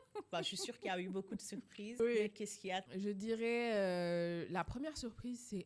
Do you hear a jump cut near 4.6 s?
no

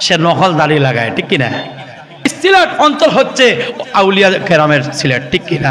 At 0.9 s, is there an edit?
no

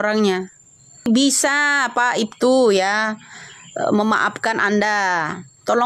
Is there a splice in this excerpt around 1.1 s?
yes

